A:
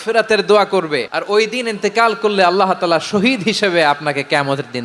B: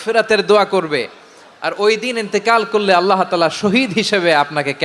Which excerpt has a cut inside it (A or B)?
A